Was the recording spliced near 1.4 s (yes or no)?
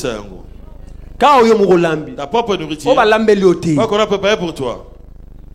no